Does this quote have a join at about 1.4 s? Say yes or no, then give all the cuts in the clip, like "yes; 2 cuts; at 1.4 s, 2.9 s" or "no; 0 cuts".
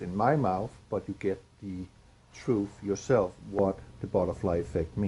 no; 0 cuts